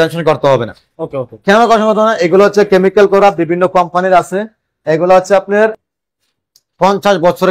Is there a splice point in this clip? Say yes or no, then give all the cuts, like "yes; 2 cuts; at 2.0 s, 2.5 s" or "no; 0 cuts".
no; 0 cuts